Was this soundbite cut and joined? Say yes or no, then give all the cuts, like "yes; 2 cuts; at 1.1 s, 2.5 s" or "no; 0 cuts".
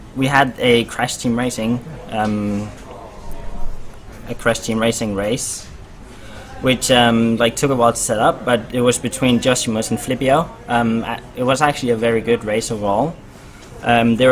no; 0 cuts